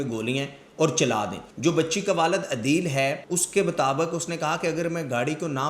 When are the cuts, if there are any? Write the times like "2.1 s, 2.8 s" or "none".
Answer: 1.4 s, 3.3 s